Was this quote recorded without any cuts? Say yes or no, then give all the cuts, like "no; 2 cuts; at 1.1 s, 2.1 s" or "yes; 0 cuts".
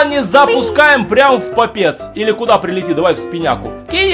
yes; 0 cuts